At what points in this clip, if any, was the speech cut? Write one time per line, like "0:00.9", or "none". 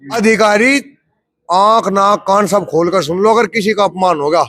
none

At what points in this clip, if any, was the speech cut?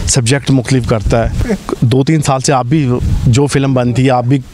0:01.4

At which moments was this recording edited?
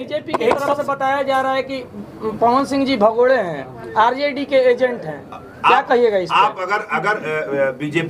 none

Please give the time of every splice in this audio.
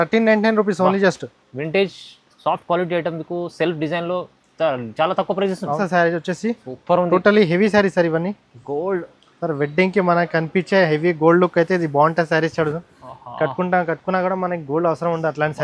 0:05.8

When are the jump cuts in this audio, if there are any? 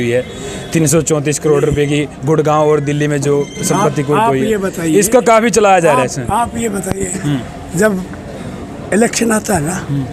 none

